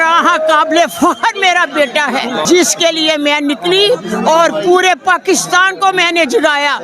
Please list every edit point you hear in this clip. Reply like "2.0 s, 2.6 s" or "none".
2.4 s